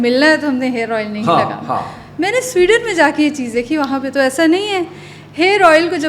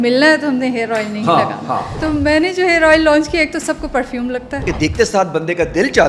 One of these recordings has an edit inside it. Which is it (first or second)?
second